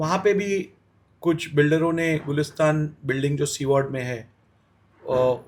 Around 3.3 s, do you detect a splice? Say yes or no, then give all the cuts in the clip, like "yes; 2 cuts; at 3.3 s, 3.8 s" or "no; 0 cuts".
no; 0 cuts